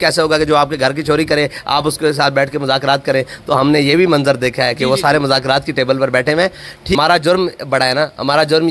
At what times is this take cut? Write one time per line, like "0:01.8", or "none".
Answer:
0:07.0